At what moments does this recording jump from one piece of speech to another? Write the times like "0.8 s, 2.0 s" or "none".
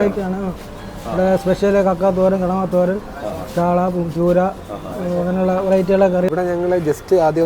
6.3 s